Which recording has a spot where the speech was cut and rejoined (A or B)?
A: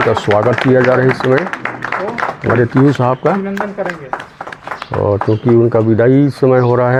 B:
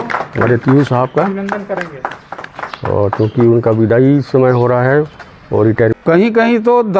B